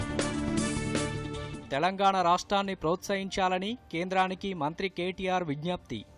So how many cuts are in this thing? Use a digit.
1